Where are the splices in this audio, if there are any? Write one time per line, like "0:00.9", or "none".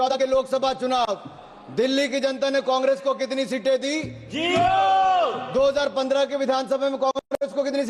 none